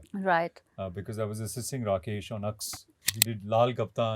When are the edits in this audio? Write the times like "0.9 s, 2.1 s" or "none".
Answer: 3.1 s